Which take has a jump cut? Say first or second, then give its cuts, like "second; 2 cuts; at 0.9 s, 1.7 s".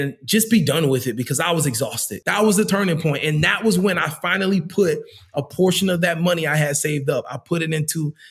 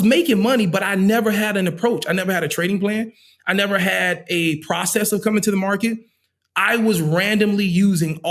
first; 1 cut; at 2.1 s